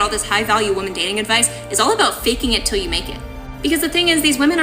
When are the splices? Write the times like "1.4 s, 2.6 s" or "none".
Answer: 3.2 s